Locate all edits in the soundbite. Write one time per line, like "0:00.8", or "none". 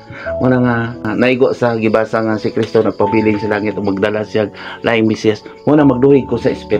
0:01.1